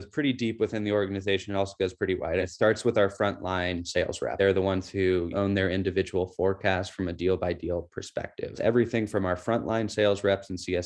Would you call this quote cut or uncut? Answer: cut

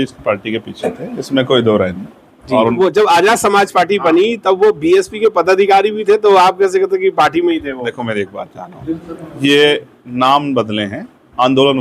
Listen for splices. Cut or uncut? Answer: cut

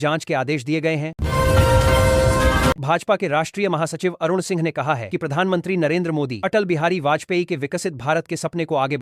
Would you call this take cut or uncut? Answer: uncut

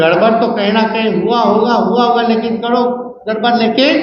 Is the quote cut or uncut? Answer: uncut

